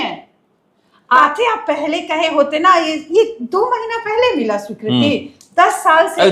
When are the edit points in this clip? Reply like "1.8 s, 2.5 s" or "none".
1.2 s